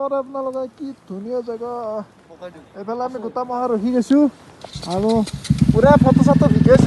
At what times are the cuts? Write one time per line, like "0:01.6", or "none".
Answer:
none